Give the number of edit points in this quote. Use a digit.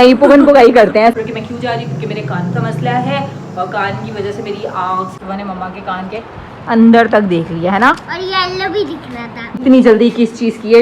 3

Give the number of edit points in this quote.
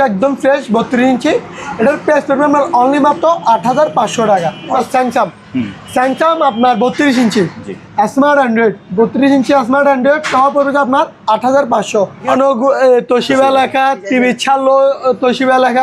2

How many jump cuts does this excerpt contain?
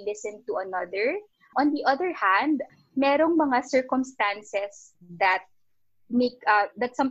2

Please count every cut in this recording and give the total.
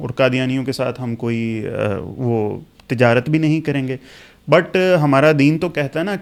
0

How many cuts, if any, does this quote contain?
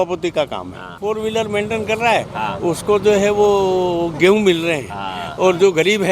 1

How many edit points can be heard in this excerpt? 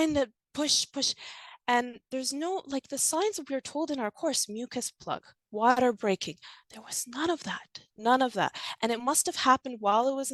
0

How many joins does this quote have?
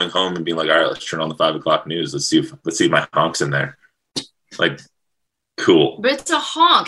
1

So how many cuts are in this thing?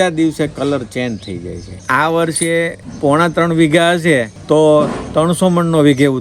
3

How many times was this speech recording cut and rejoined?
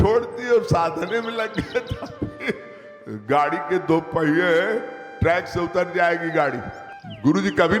1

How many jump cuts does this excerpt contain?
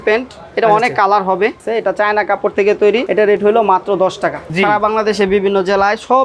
3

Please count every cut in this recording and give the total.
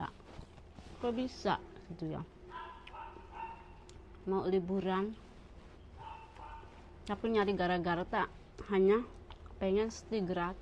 0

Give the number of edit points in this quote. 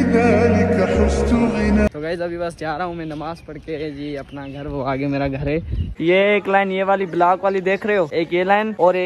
3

